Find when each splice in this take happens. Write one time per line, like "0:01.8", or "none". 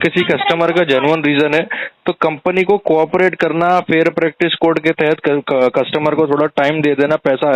none